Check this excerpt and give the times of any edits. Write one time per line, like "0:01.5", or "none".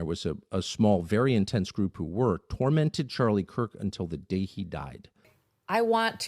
0:05.2